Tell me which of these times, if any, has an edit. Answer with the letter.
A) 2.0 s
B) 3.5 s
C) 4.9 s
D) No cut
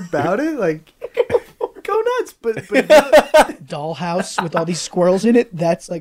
B